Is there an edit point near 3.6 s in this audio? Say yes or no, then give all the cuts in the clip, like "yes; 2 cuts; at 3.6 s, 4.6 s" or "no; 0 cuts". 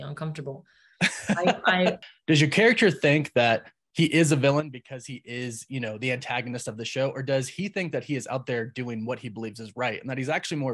no; 1 cut; at 2.0 s